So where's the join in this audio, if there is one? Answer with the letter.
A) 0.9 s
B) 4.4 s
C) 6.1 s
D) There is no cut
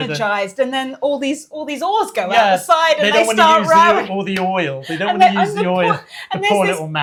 D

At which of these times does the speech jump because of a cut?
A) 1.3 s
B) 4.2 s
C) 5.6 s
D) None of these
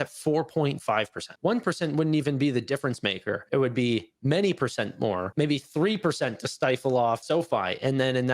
A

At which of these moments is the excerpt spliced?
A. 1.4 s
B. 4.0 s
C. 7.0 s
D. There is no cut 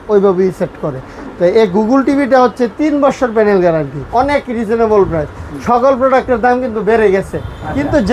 B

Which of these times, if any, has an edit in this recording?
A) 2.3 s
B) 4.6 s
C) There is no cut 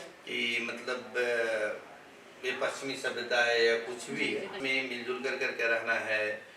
B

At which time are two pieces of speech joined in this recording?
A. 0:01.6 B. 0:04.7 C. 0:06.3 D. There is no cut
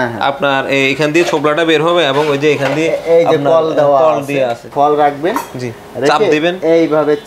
B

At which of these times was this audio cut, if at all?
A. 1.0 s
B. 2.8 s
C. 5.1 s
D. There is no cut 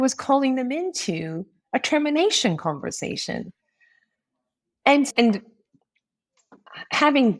C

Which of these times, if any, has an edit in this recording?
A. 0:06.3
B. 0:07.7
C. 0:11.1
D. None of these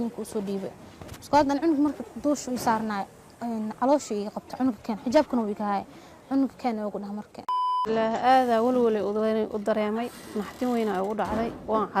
B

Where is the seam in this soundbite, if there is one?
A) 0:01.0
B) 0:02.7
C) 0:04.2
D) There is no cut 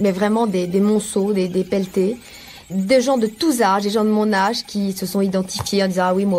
B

